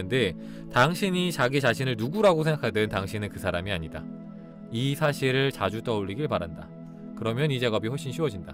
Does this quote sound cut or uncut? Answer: uncut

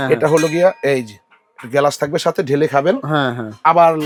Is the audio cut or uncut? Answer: uncut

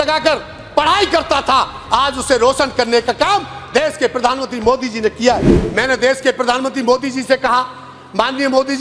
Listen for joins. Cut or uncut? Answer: cut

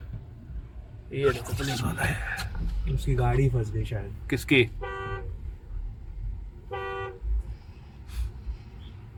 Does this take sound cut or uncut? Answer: uncut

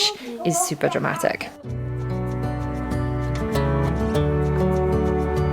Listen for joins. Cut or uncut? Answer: uncut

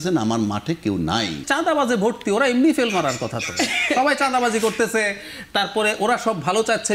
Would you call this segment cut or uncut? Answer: cut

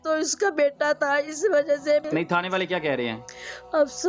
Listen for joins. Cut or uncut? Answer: cut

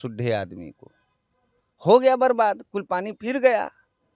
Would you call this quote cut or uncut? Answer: uncut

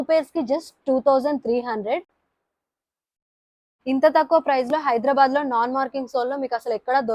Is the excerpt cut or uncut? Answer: uncut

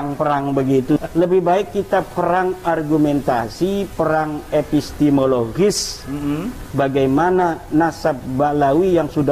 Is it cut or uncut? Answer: cut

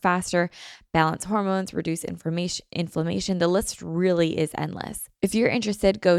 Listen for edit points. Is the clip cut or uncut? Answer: cut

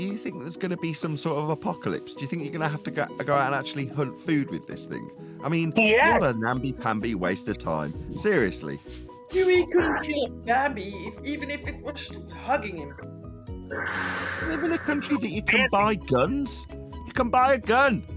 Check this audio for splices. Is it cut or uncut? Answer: uncut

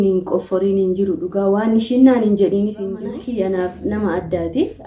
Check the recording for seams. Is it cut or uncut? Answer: cut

